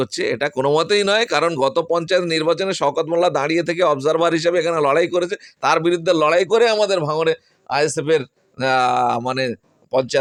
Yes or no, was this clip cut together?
no